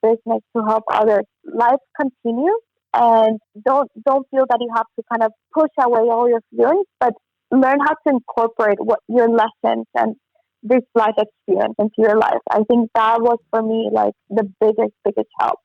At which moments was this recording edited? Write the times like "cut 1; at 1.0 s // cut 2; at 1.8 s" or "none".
cut 1; at 1.4 s // cut 2; at 3.5 s // cut 3; at 5.4 s